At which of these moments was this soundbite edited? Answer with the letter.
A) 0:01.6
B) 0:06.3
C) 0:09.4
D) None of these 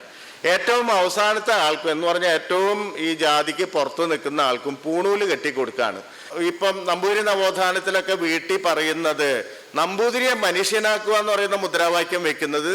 B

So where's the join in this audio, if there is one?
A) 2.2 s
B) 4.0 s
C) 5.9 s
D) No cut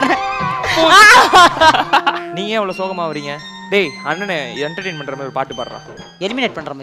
A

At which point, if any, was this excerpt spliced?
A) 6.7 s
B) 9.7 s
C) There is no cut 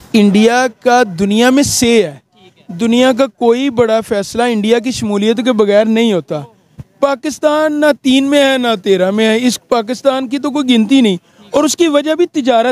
C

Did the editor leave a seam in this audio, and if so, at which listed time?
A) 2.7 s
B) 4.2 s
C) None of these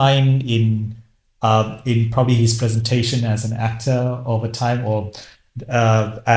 C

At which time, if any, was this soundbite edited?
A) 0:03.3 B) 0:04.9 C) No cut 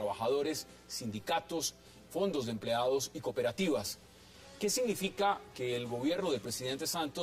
A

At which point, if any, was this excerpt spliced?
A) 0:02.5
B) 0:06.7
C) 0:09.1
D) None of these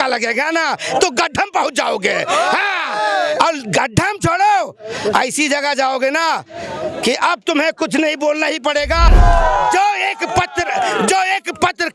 C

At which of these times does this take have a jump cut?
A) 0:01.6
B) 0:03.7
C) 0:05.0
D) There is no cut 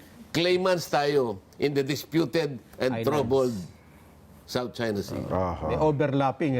D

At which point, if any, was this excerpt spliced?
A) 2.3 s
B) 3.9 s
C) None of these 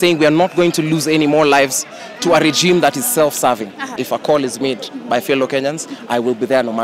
B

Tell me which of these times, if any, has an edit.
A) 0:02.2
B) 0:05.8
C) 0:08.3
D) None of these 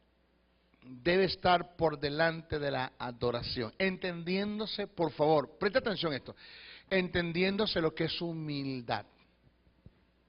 B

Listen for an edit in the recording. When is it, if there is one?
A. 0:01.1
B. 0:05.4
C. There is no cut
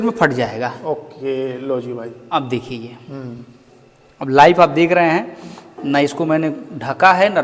C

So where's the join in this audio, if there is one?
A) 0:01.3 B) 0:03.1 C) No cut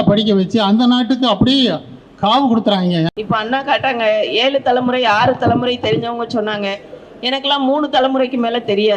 B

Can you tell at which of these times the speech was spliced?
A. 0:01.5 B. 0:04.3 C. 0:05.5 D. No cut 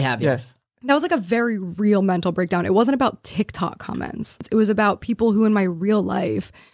B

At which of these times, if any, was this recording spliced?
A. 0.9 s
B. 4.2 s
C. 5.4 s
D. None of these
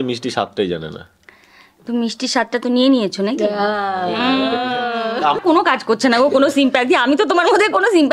C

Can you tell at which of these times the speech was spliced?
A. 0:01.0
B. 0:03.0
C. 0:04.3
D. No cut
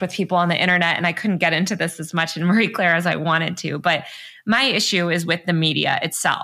D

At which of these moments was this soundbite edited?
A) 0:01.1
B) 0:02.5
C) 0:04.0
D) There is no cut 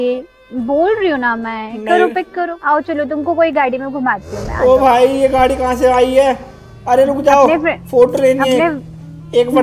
B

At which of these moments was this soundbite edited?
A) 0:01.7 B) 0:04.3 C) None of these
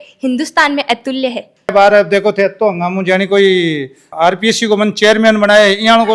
A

